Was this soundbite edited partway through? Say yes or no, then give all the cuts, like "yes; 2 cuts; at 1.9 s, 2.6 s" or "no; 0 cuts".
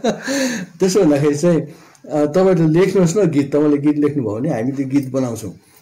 no; 0 cuts